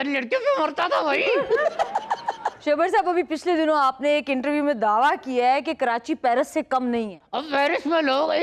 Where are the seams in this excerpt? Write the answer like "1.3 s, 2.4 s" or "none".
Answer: 2.5 s, 7.2 s